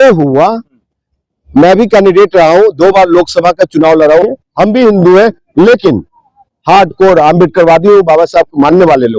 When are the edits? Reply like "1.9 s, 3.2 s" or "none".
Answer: 4.3 s